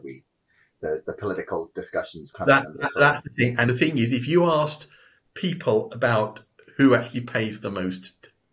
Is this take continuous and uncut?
no; 1 cut; at 3.7 s

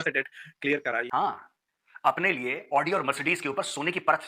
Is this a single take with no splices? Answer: no; 1 cut; at 1.1 s

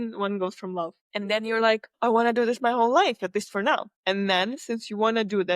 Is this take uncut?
no; 3 cuts; at 1.0 s, 1.9 s, 3.9 s

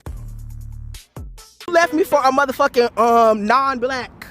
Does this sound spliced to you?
yes; 1 cut; at 1.7 s

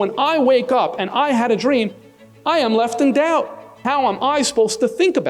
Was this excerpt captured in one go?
no; 1 cut; at 3.8 s

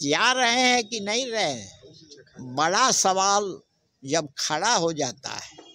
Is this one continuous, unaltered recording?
yes; 0 cuts

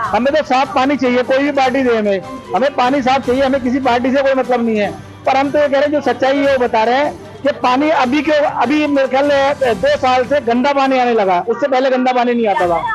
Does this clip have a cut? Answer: no; 0 cuts

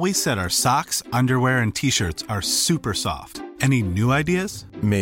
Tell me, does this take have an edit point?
no; 0 cuts

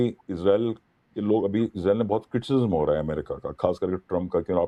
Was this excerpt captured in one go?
yes; 0 cuts

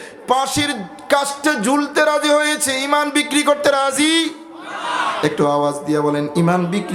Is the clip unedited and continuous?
yes; 0 cuts

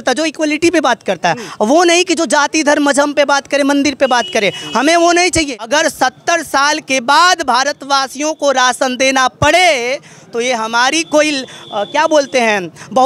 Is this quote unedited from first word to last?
no; 1 cut; at 5.6 s

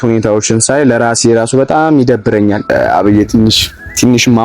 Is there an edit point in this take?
yes; 1 cut; at 2.6 s

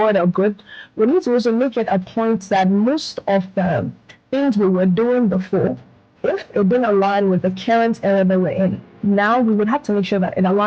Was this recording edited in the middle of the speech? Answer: no; 0 cuts

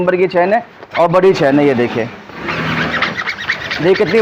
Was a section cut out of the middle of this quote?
no; 0 cuts

